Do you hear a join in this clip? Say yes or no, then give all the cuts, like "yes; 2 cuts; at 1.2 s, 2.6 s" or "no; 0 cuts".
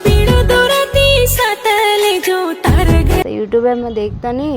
yes; 1 cut; at 3.2 s